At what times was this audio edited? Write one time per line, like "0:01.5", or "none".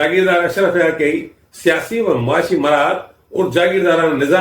none

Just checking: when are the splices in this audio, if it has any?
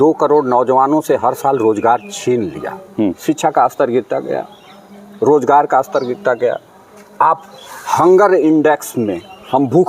0:03.2

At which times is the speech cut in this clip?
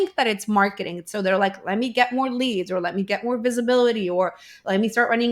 none

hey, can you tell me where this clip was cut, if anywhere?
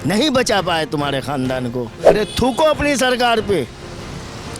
0:02.0

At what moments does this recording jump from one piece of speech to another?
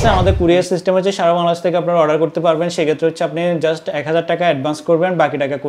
none

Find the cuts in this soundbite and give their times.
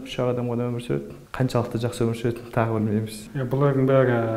0:01.2
0:03.3

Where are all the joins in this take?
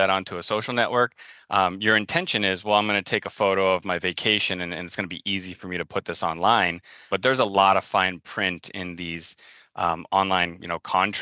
0:07.1

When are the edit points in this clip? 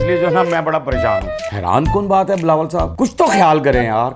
0:01.2
0:02.9

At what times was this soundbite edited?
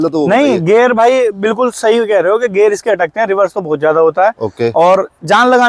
none

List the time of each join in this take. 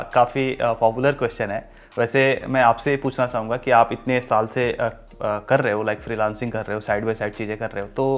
none

